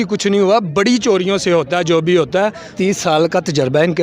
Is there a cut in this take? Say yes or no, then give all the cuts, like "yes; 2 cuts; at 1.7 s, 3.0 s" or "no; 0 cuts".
yes; 1 cut; at 2.6 s